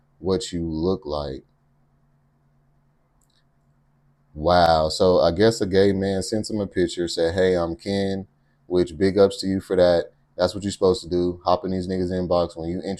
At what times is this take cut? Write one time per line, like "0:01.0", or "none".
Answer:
none

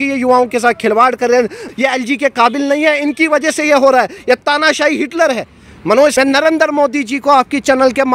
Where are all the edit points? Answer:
0:01.6
0:06.1

